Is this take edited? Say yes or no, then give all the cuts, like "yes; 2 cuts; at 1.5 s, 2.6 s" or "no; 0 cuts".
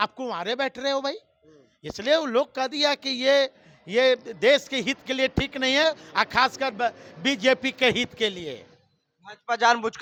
no; 0 cuts